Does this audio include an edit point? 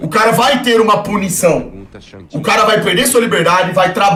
no; 0 cuts

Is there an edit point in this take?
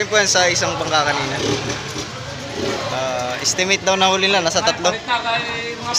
no; 0 cuts

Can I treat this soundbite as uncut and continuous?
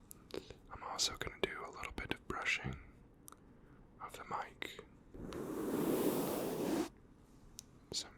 no; 1 cut; at 5.0 s

